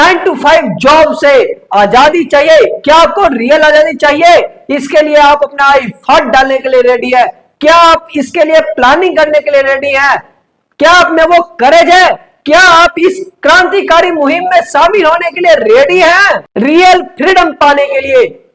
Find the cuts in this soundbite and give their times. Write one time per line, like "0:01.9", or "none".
0:16.4